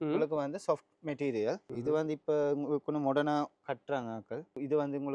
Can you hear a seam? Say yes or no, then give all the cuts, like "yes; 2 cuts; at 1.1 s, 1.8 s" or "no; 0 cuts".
no; 0 cuts